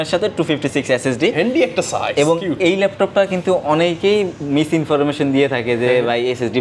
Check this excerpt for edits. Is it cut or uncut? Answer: uncut